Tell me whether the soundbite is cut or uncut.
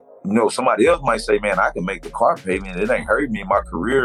uncut